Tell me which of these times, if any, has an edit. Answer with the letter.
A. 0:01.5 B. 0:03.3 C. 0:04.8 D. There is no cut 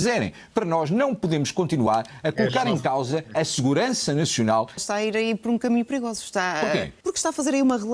C